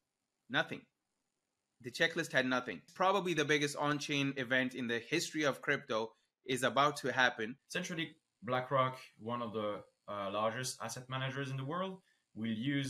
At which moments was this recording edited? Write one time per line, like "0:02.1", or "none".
0:02.9
0:07.6

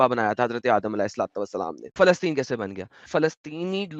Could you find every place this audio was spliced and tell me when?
0:01.9
0:03.1

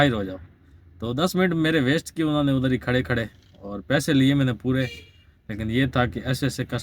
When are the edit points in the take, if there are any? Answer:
none

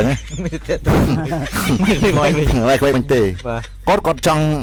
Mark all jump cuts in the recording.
none

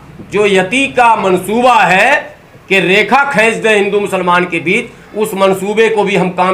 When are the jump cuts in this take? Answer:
none

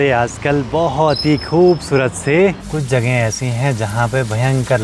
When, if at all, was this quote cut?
0:02.7

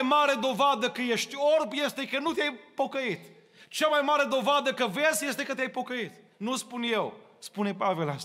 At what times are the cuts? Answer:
none

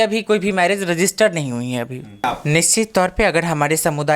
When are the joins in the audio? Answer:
0:02.2

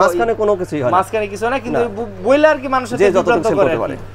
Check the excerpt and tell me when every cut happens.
none

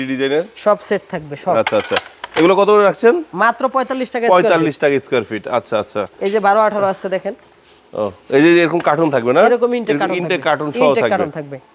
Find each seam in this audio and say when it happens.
none

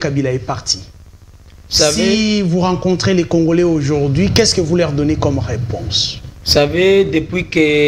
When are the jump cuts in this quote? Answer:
none

